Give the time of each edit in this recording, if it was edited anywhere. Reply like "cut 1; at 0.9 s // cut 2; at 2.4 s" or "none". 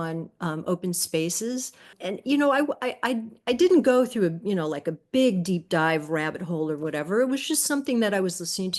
cut 1; at 2.0 s